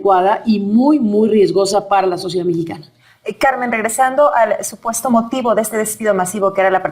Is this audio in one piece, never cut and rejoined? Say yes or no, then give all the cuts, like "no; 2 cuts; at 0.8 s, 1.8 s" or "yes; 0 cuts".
no; 1 cut; at 2.8 s